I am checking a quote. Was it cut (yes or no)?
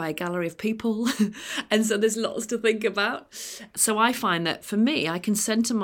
yes